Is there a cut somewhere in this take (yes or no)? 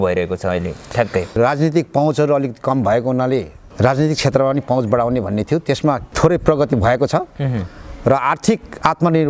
yes